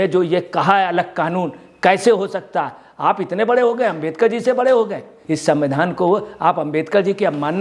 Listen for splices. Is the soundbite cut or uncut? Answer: cut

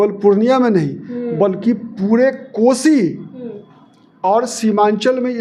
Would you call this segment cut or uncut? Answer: uncut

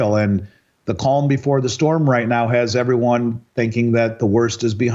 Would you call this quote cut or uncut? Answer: uncut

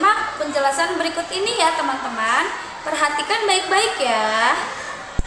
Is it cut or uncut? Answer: uncut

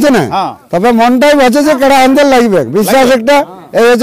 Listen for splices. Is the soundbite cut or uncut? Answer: uncut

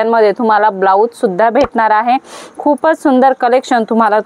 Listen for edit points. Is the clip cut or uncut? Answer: uncut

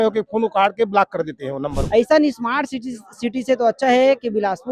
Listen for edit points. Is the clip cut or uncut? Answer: cut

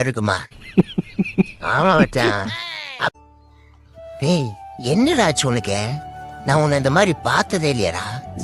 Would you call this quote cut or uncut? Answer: cut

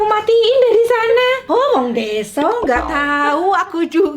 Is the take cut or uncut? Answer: cut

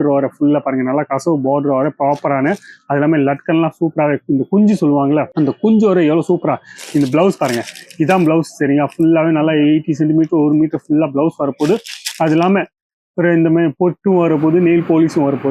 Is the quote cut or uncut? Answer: uncut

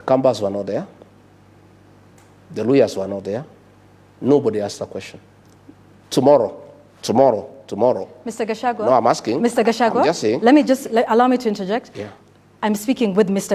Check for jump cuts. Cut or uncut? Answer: uncut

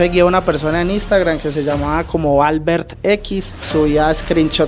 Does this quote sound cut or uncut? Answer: cut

